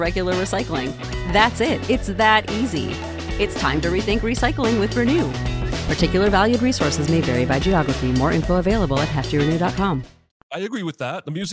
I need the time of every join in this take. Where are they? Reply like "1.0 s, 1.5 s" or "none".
10.5 s